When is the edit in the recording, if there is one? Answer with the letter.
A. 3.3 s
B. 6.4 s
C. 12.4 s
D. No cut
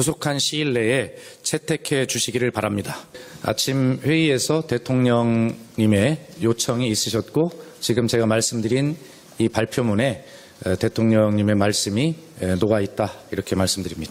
C